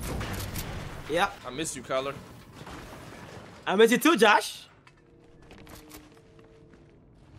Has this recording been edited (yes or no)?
yes